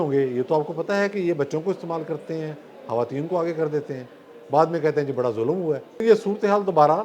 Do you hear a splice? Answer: yes; 1 cut; at 6.0 s

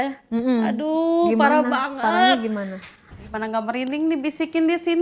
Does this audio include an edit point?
yes; 1 cut; at 3.2 s

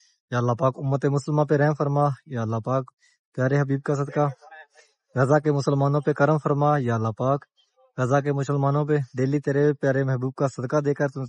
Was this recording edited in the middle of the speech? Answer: yes; 1 cut; at 9.1 s

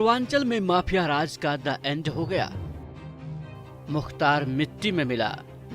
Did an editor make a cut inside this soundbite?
yes; 2 cuts; at 2.5 s, 3.8 s

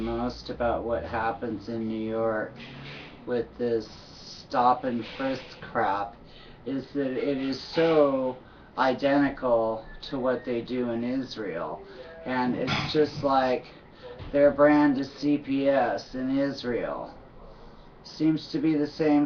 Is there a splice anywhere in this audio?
no; 0 cuts

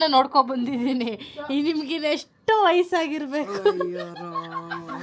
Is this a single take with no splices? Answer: yes; 0 cuts

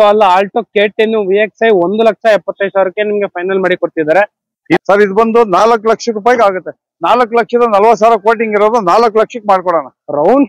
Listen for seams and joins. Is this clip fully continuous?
no; 1 cut; at 4.8 s

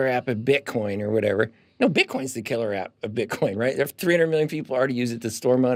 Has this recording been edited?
no; 0 cuts

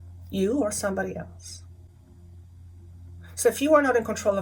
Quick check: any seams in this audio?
no; 0 cuts

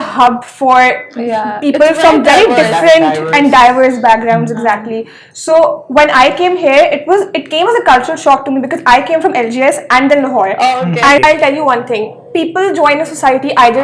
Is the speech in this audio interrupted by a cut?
yes; 1 cut; at 11.2 s

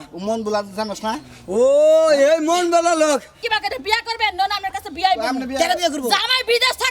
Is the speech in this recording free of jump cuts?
no; 1 cut; at 3.4 s

